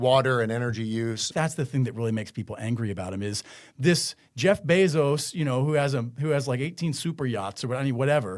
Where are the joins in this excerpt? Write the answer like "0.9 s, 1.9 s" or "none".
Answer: 1.3 s